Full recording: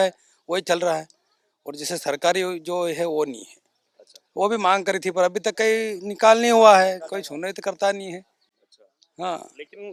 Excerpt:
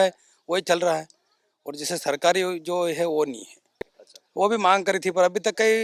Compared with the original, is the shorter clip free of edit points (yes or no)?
yes